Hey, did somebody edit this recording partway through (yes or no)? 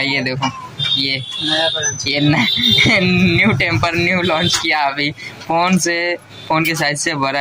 no